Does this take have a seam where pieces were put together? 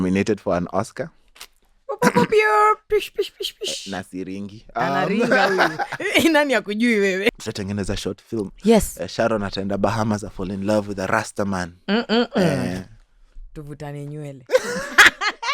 yes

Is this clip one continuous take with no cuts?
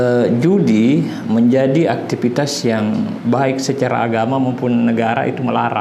yes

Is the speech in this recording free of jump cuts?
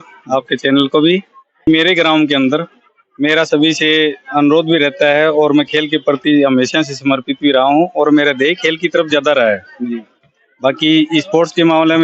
no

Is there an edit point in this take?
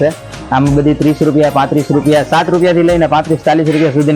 no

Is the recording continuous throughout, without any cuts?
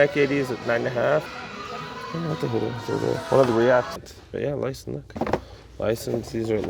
no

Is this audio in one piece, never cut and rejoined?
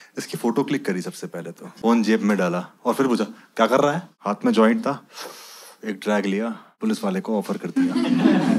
no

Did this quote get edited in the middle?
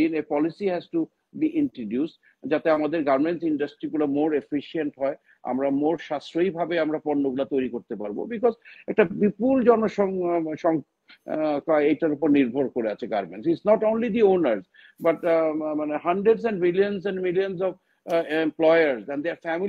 no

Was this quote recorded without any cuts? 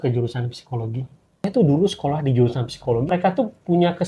no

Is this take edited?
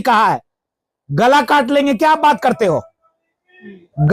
no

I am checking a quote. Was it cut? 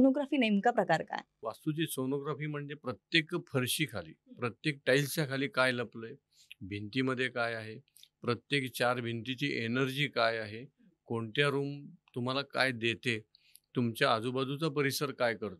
yes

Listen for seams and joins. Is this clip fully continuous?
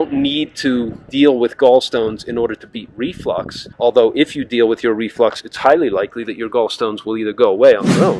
no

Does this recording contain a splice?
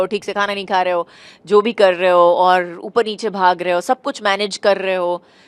no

